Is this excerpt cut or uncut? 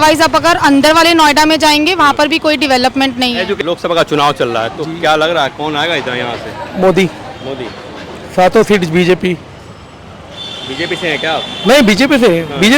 cut